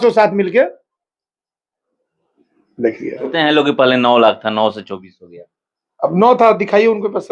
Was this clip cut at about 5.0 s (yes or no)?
no